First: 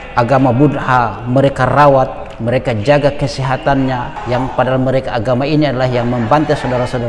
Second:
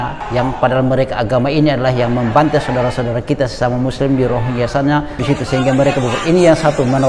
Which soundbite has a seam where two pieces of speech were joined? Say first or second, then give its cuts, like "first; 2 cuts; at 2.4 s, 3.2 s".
second; 1 cut; at 5.2 s